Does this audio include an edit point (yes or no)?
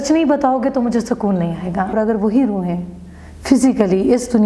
yes